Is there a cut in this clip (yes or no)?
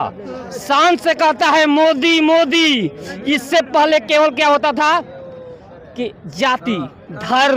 no